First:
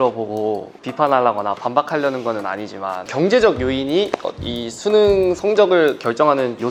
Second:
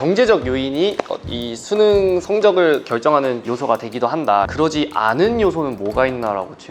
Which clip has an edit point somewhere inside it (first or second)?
second